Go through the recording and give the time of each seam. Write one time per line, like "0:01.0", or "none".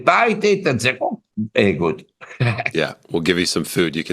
0:01.3